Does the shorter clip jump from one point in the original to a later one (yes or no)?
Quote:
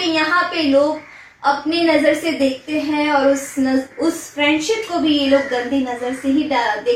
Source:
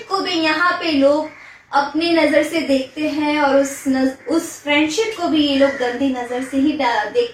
no